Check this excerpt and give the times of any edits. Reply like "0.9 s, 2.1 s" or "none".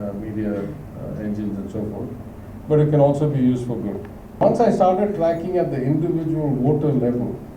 4.4 s

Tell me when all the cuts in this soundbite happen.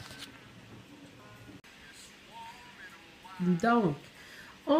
1.7 s

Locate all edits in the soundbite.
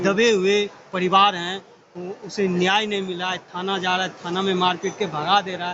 none

